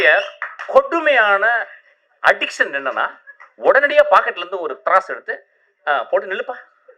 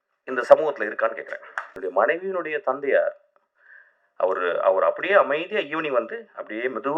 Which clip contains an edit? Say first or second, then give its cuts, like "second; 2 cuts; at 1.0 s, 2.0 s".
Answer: second; 1 cut; at 1.6 s